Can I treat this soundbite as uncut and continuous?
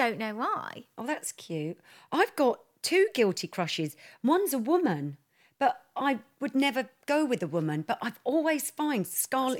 yes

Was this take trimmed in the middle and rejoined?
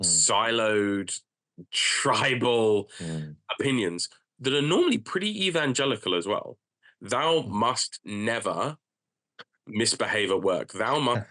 no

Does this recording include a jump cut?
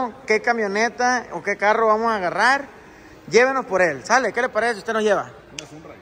no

